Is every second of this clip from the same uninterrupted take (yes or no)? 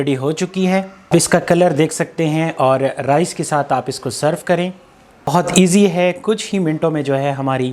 no